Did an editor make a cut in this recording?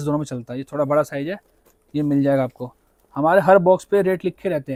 no; 0 cuts

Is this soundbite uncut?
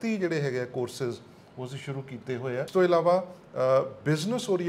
no; 1 cut; at 2.7 s

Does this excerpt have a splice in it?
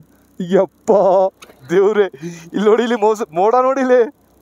no; 0 cuts

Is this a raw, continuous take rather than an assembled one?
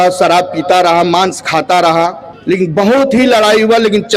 no; 1 cut; at 2.3 s

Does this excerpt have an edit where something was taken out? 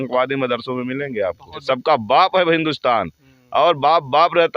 yes; 1 cut; at 1.6 s

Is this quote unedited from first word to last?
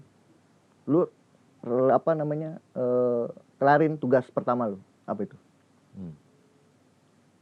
yes; 0 cuts

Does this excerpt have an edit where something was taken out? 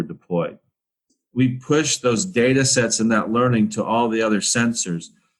yes; 1 cut; at 1.2 s

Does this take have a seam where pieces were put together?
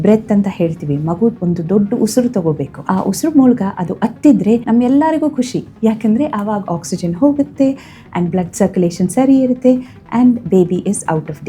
yes; 3 cuts; at 1.4 s, 2.7 s, 4.6 s

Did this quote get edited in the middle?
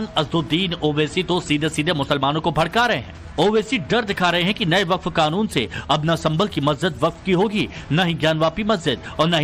yes; 1 cut; at 2.5 s

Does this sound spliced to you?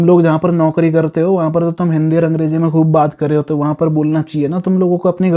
no; 0 cuts

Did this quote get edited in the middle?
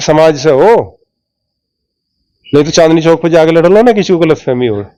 no; 0 cuts

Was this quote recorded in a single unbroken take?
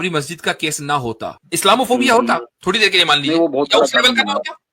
no; 2 cuts; at 1.3 s, 2.5 s

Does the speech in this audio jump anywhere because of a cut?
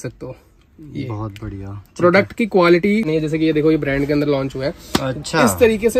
yes; 1 cut; at 3.1 s

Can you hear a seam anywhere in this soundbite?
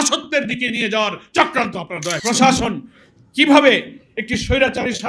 yes; 1 cut; at 2.2 s

